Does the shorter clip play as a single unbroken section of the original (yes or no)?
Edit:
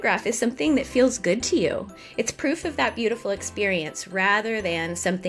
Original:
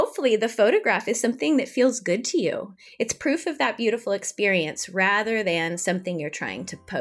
yes